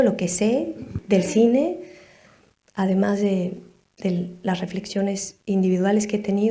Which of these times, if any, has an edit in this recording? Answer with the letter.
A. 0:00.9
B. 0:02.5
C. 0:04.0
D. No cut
A